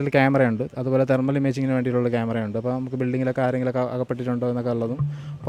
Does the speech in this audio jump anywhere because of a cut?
no; 0 cuts

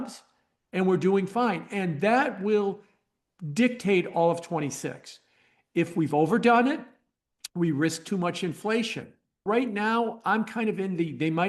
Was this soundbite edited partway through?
yes; 1 cut; at 9.4 s

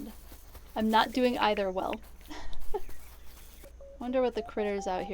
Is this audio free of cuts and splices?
no; 1 cut; at 3.7 s

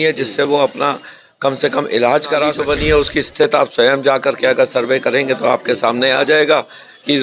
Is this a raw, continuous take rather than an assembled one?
no; 1 cut; at 2.6 s

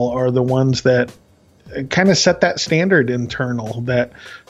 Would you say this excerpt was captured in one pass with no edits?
yes; 0 cuts

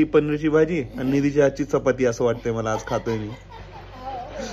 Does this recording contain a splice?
no; 0 cuts

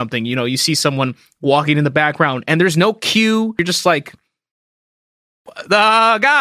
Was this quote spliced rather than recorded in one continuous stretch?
yes; 1 cut; at 3.6 s

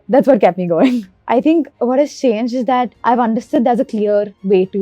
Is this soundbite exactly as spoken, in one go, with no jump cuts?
no; 1 cut; at 1.2 s

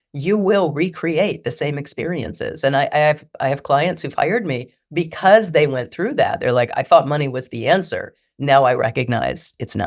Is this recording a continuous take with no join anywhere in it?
yes; 0 cuts

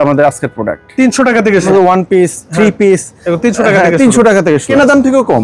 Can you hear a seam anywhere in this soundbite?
yes; 2 cuts; at 1.7 s, 4.7 s

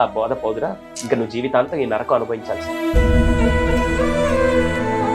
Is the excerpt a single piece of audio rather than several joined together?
yes; 0 cuts

